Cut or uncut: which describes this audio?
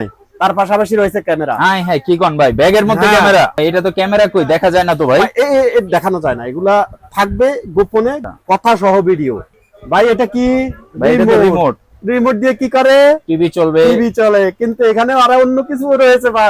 cut